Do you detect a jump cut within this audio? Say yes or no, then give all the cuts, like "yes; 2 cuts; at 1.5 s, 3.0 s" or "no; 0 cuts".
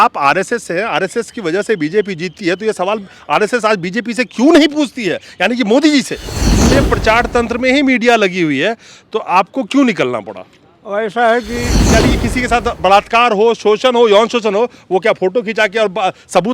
yes; 2 cuts; at 6.4 s, 11.9 s